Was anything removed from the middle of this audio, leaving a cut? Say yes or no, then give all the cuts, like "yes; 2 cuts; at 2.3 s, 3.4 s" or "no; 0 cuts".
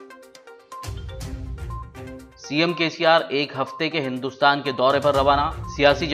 yes; 1 cut; at 2.2 s